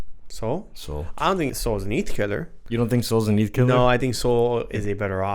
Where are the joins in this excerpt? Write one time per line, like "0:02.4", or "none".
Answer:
0:01.5
0:02.5